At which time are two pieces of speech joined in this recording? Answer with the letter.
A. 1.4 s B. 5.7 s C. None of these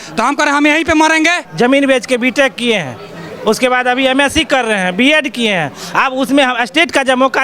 A